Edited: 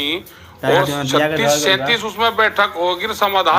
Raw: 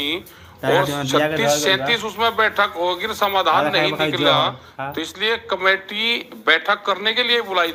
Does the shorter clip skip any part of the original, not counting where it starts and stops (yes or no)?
no